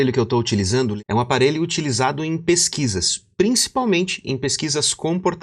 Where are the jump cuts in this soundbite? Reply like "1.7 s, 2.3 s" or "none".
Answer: 0.9 s